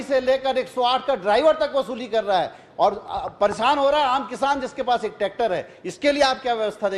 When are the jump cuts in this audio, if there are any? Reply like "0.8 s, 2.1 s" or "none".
none